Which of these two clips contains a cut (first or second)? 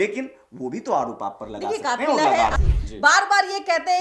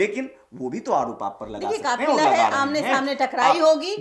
first